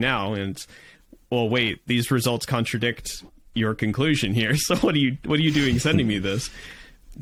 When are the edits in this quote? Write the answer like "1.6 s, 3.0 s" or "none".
none